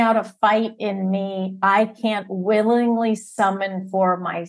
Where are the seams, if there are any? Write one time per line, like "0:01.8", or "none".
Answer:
none